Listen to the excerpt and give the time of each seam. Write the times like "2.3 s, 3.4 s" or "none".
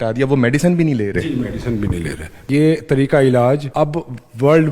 2.5 s, 3.7 s